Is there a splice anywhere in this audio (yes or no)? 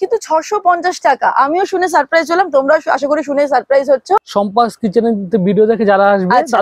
yes